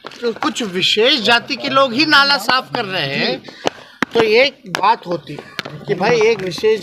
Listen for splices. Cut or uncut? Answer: uncut